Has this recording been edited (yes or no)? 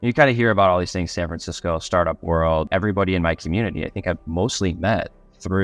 yes